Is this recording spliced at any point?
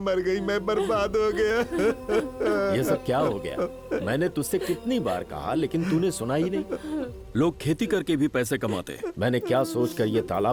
no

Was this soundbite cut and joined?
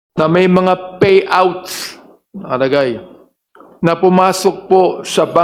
no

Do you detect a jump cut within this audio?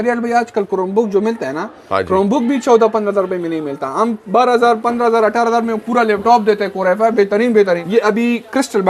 yes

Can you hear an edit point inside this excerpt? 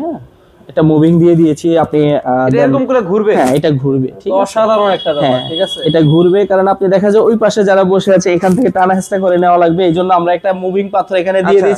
no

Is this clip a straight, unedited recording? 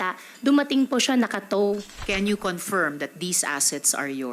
no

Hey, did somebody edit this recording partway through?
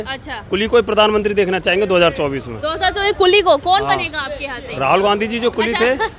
no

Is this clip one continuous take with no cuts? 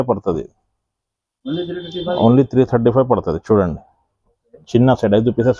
yes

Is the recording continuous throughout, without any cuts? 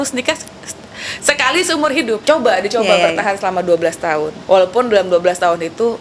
no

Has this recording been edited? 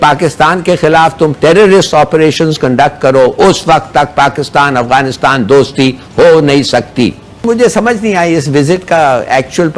yes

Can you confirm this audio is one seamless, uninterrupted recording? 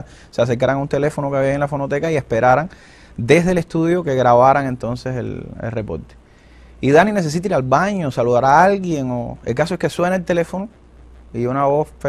no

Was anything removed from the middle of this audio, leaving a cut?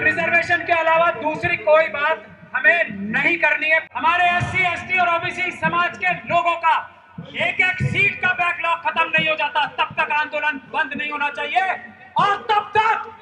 yes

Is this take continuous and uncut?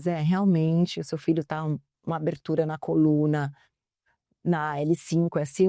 yes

